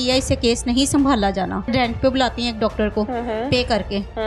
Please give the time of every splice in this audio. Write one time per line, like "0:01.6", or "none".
0:01.7